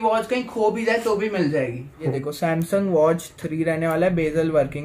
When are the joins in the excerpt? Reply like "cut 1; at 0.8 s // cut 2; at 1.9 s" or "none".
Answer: cut 1; at 2.0 s